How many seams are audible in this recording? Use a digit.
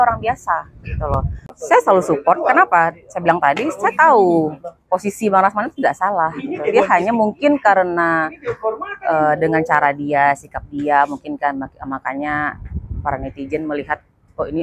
1